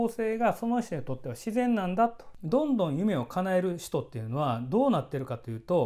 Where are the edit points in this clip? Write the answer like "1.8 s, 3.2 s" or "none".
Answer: 2.3 s